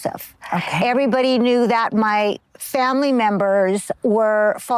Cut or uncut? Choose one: cut